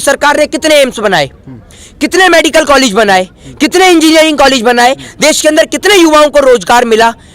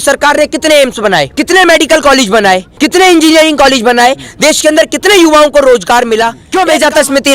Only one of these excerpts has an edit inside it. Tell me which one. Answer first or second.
second